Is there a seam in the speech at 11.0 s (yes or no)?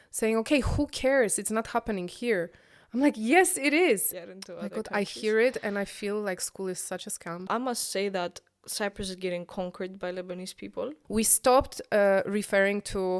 yes